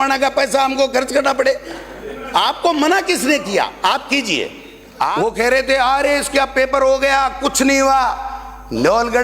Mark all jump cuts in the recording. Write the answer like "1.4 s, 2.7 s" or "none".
5.1 s